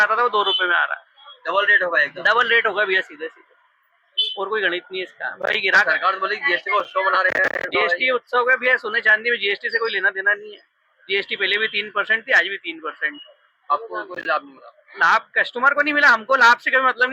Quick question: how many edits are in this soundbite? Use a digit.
0